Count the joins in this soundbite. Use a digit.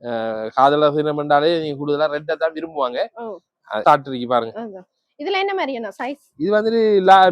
1